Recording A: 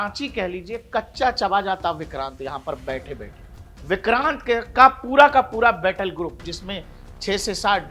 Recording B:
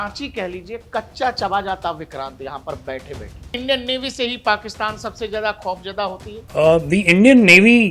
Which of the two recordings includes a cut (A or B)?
B